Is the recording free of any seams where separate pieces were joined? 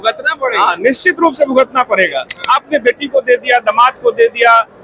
no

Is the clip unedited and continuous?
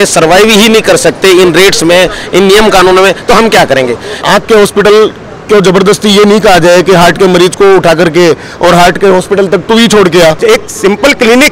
no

